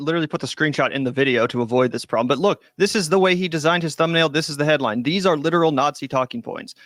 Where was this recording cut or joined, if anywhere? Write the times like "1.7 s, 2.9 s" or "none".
none